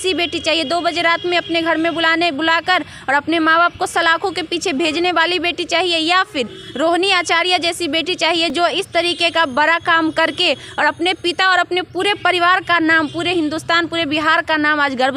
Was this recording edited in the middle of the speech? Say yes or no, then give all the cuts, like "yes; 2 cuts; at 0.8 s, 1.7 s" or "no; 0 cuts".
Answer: no; 0 cuts